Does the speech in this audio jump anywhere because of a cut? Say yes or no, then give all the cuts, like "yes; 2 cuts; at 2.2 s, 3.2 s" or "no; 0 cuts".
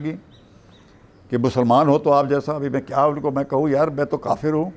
no; 0 cuts